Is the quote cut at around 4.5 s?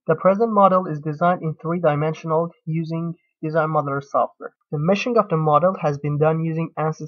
yes; 1 cut; at 4.5 s

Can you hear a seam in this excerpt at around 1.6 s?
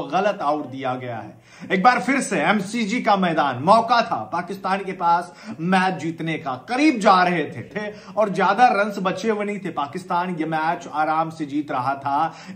no; 0 cuts

